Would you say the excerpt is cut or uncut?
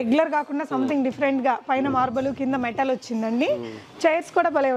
uncut